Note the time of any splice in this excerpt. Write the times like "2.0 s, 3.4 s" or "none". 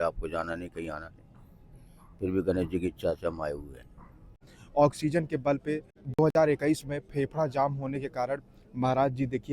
4.4 s, 6.1 s